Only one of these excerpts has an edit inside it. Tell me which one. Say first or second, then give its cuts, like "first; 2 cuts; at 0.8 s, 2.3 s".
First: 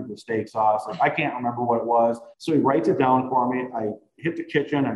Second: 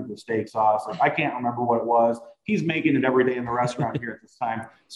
first; 1 cut; at 2.3 s